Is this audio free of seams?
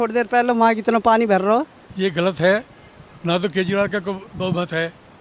no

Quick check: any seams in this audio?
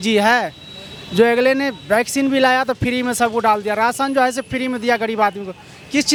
no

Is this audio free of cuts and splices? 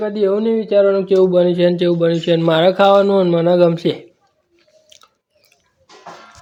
yes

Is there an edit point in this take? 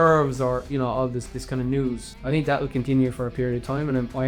yes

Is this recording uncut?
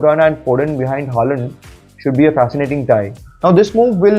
no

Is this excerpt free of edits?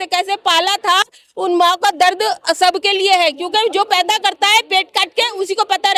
yes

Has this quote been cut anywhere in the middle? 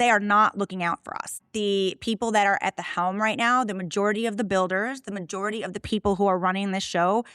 yes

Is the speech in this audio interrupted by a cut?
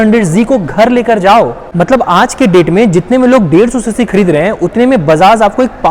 yes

